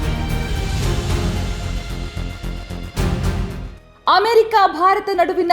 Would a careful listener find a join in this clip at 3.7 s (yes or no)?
yes